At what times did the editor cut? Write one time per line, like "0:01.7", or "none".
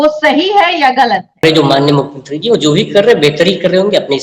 0:01.4